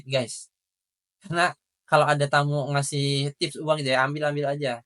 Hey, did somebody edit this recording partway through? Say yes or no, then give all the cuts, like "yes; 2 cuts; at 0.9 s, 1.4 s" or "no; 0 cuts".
no; 0 cuts